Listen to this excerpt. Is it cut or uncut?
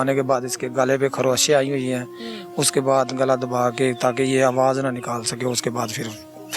uncut